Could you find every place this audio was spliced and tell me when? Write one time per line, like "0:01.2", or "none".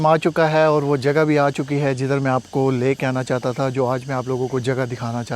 none